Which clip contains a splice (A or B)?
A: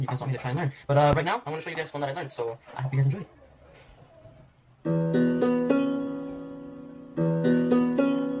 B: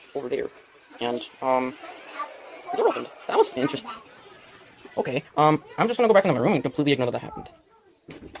B